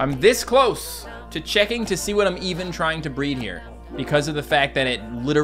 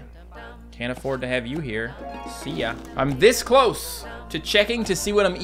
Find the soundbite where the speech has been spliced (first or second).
first